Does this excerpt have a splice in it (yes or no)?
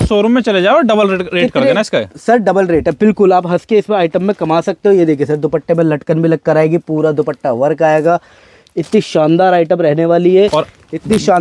no